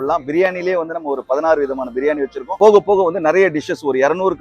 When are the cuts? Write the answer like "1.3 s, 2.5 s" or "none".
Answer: 2.5 s

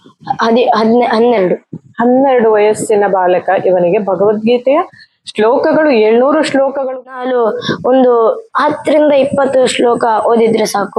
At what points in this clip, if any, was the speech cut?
7.0 s

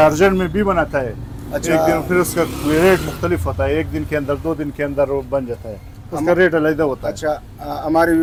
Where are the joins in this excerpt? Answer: none

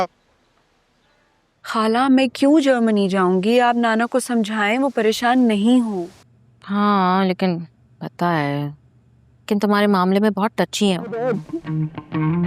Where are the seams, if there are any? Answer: 1.7 s, 11.2 s

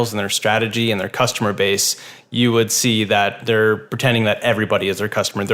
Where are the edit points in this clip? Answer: 3.4 s

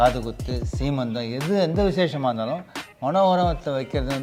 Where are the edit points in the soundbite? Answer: none

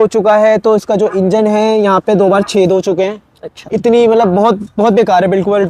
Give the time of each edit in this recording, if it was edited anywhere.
none

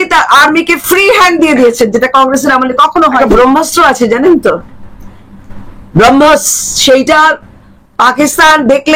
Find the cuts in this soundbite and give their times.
3.2 s

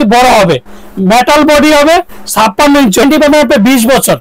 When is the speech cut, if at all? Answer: 3.0 s

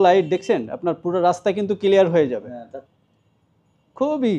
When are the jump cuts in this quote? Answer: 2.8 s

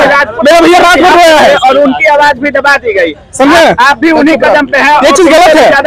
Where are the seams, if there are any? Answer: none

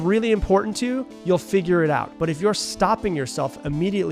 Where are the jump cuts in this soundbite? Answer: 2.1 s

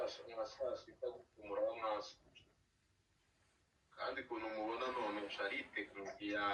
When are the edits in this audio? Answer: none

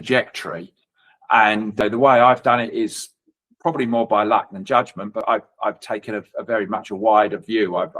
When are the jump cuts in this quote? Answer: 1.8 s, 5.2 s

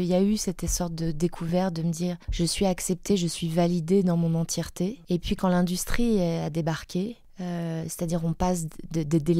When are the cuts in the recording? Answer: 2.2 s, 5.0 s, 7.3 s

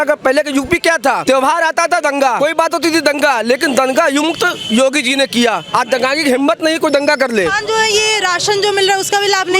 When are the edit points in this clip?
1.2 s, 2.4 s, 7.6 s

